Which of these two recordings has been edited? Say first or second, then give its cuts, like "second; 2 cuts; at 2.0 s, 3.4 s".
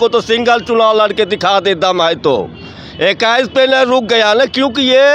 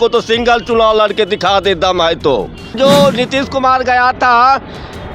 second; 1 cut; at 2.7 s